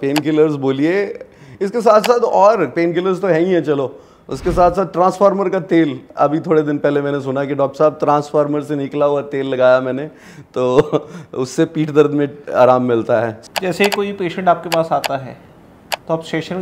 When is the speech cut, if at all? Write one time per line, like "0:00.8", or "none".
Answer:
0:13.4